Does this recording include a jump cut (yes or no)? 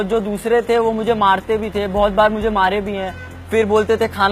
no